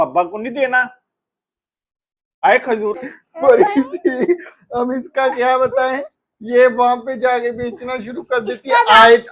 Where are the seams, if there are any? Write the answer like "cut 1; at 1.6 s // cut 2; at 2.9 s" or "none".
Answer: cut 1; at 3.0 s

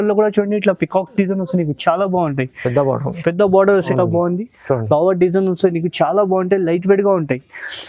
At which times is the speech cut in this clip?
cut 1; at 3.9 s

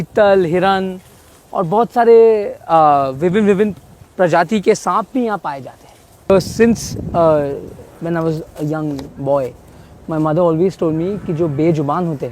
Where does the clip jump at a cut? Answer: cut 1; at 6.3 s

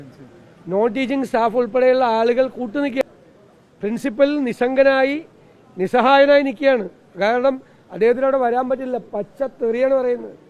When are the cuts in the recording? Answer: cut 1; at 3.0 s

